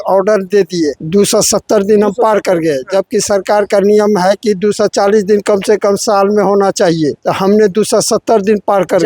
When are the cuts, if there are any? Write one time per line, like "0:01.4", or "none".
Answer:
0:01.0
0:07.2